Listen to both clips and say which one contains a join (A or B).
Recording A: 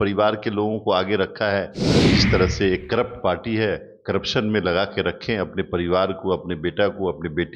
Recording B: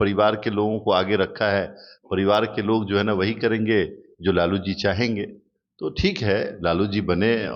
A